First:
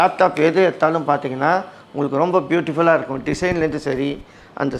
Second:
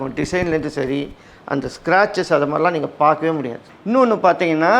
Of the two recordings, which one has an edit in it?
second; 1 cut; at 3.6 s

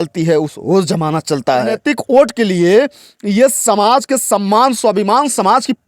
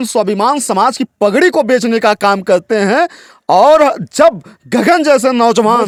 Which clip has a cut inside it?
first; 1 cut; at 1.8 s

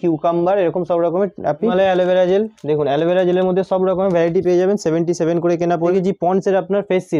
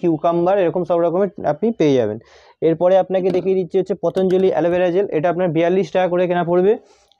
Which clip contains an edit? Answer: first; 2 cuts; at 1.7 s, 5.9 s

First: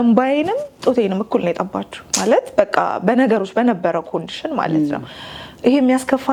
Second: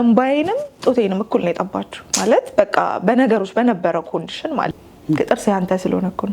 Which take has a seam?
second; 1 cut; at 4.7 s

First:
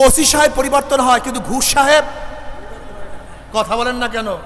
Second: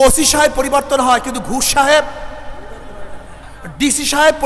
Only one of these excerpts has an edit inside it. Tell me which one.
second; 1 cut; at 3.4 s

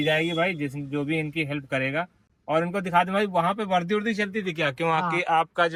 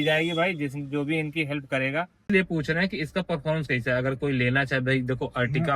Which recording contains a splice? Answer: second; 1 cut; at 2.3 s

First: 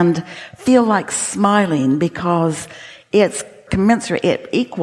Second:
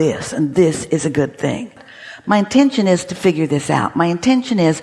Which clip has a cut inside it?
second; 1 cut; at 1.9 s

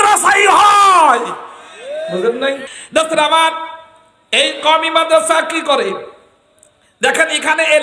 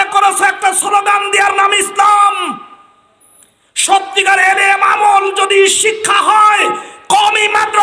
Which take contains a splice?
first; 1 cut; at 2.7 s

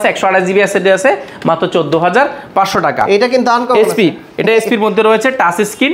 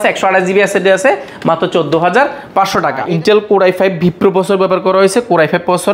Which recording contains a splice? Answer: second; 1 cut; at 3.0 s

